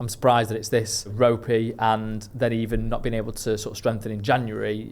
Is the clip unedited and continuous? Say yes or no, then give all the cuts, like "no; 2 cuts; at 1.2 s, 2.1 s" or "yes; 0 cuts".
no; 1 cut; at 1.1 s